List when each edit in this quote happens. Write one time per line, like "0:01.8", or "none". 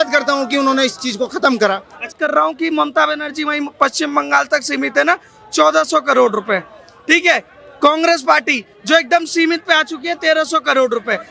0:02.1